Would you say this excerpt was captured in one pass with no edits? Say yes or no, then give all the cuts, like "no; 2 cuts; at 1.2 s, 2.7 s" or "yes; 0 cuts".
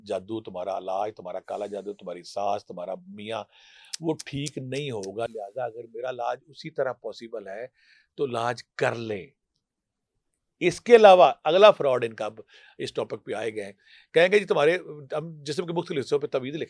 yes; 0 cuts